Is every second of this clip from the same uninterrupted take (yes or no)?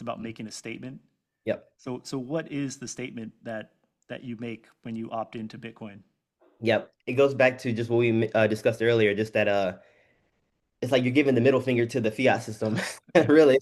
yes